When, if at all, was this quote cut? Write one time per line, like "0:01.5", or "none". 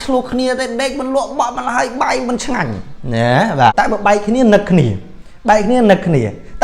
0:03.7